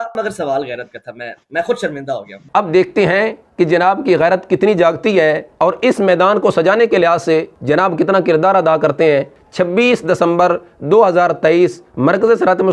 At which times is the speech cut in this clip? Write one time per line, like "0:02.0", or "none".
0:09.4